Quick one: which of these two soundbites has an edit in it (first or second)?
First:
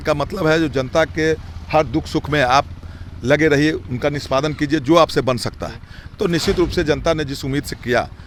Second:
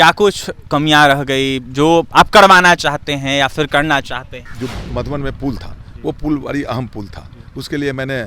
second